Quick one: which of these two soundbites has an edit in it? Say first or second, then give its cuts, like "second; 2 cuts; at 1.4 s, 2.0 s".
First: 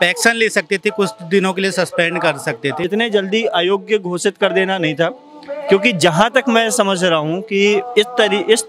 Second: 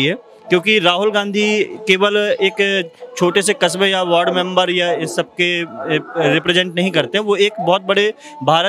first; 1 cut; at 2.9 s